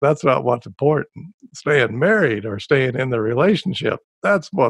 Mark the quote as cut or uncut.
uncut